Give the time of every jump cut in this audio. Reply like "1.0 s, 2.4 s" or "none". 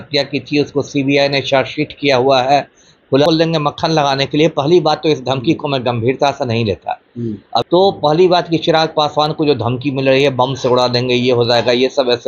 3.2 s, 7.6 s